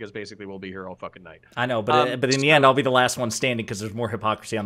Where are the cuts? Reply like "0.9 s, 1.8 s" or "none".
none

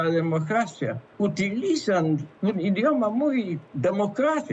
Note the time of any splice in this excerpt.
1.0 s, 2.3 s, 3.6 s

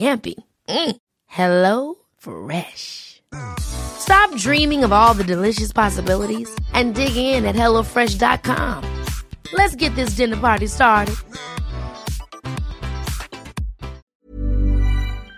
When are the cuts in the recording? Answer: 14.0 s

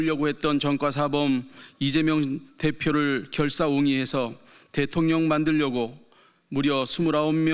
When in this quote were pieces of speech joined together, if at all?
none

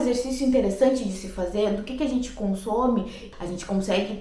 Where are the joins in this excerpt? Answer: 3.3 s

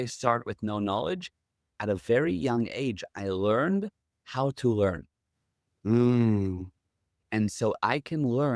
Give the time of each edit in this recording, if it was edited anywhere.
1.7 s

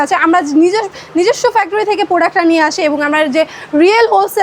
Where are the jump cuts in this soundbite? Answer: none

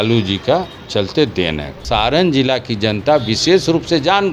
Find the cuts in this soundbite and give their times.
1.8 s

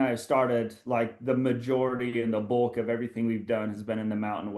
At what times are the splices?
none

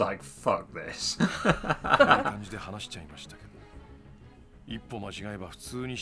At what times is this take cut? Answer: none

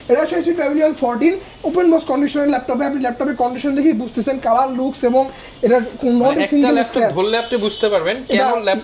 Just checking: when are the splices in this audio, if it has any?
none

